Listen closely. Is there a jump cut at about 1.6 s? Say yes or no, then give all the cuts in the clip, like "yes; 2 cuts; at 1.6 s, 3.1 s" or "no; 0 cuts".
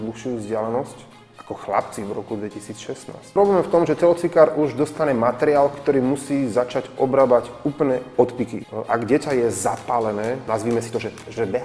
no; 3 cuts; at 3.4 s, 8.7 s, 10.4 s